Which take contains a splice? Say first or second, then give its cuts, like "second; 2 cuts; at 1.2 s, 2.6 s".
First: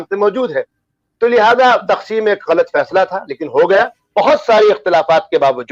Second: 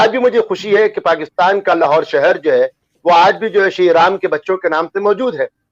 first; 1 cut; at 4.0 s